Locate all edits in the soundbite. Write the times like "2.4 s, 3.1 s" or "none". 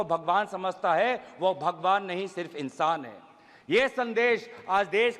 none

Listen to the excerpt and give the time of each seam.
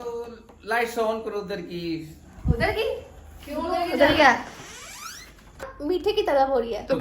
5.7 s

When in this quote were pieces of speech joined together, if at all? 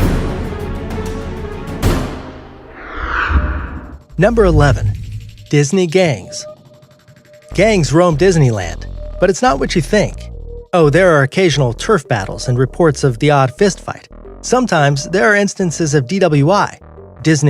12.0 s

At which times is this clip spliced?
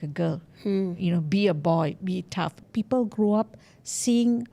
2.6 s

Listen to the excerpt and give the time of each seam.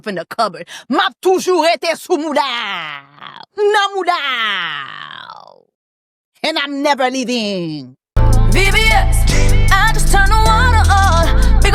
8.1 s

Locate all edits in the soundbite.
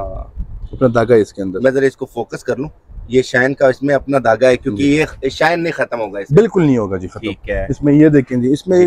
none

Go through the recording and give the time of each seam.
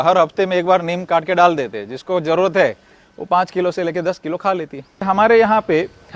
5.0 s

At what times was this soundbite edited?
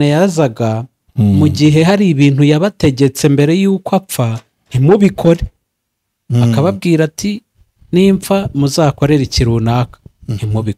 none

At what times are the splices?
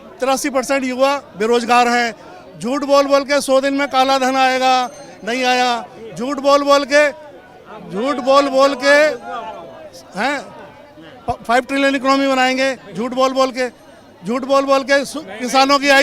none

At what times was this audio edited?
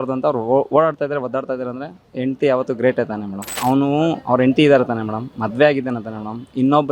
3.5 s

